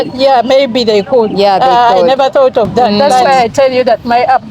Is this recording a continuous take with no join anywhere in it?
no; 1 cut; at 3.2 s

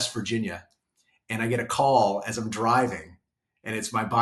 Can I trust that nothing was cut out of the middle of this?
yes; 0 cuts

